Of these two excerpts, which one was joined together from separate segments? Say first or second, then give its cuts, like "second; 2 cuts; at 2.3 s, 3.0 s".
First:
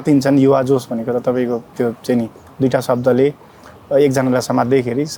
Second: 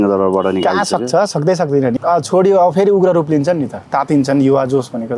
second; 1 cut; at 1.9 s